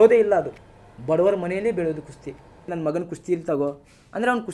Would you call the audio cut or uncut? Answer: cut